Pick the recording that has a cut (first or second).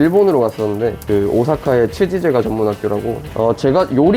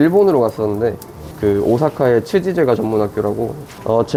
first